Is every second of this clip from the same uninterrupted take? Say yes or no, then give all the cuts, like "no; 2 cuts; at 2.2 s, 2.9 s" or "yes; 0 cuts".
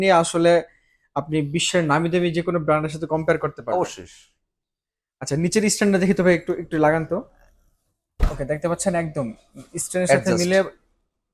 yes; 0 cuts